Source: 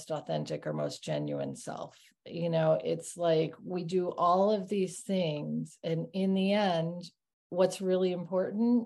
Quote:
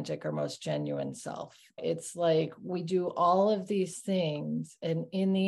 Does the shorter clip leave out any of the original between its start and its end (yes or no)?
yes